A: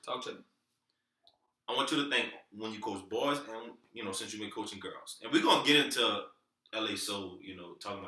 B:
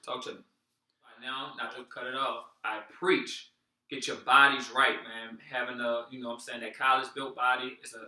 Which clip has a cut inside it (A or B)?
B